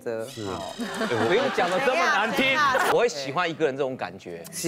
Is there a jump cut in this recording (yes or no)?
yes